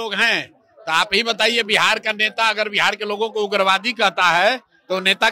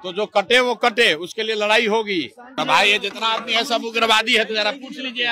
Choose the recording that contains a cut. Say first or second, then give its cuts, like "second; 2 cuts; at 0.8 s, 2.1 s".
second; 1 cut; at 2.5 s